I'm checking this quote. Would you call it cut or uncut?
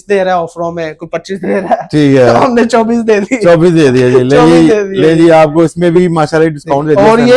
uncut